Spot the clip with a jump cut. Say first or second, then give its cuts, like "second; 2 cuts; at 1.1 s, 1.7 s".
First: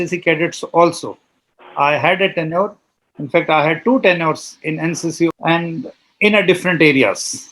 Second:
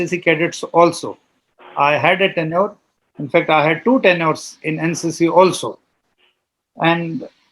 first; 1 cut; at 5.3 s